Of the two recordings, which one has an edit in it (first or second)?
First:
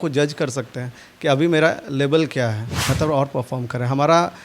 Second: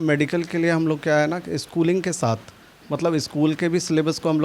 first